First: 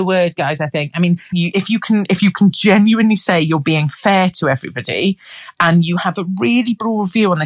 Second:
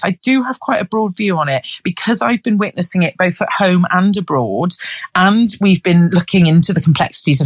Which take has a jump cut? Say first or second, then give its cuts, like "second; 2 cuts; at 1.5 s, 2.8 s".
first; 1 cut; at 1.3 s